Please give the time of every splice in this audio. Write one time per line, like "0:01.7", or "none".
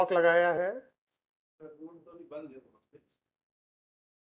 none